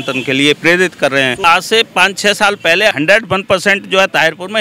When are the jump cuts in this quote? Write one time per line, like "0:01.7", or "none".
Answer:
0:01.4
0:02.9